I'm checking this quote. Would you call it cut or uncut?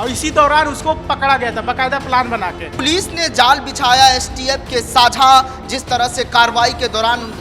cut